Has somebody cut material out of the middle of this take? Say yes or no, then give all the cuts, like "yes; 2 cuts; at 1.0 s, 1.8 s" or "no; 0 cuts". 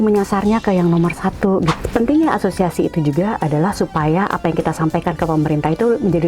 yes; 1 cut; at 1.8 s